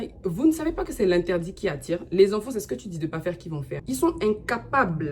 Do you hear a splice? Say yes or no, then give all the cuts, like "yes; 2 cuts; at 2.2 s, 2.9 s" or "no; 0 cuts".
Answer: yes; 1 cut; at 3.7 s